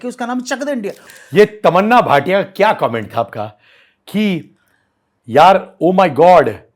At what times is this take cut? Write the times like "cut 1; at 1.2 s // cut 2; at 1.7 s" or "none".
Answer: cut 1; at 1.0 s